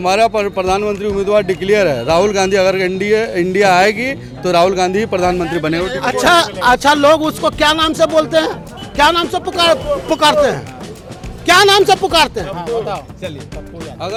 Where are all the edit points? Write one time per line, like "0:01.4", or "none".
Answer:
none